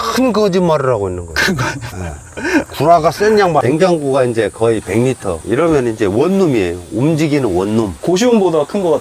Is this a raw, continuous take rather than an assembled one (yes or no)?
no